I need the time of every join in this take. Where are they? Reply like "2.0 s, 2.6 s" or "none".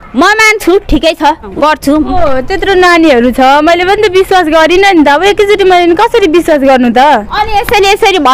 1.5 s